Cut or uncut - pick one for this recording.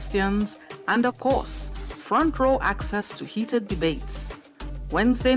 uncut